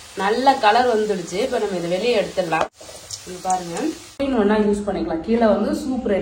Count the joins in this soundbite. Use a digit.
2